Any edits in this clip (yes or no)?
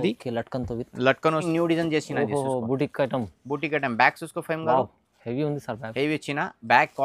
yes